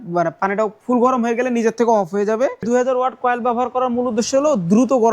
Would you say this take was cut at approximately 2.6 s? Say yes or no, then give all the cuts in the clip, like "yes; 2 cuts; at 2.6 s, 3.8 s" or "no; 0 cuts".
yes; 1 cut; at 2.6 s